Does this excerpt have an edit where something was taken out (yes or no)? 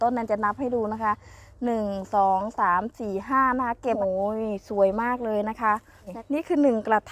yes